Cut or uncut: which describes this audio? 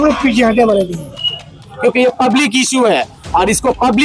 cut